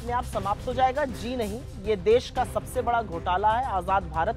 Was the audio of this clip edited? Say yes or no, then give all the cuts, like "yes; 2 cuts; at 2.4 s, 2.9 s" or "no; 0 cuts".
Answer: no; 0 cuts